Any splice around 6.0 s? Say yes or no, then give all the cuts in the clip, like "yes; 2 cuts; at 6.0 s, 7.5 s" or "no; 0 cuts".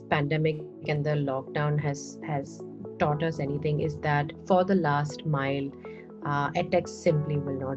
no; 0 cuts